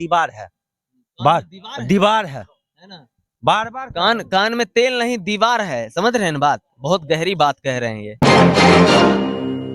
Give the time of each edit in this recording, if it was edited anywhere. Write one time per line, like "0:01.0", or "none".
0:08.1